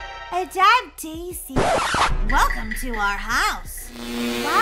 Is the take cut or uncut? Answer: cut